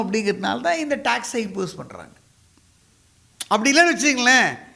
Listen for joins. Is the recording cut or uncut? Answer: uncut